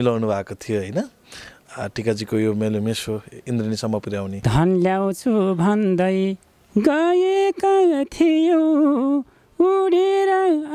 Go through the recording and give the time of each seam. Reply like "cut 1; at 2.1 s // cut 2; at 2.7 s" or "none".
cut 1; at 4.4 s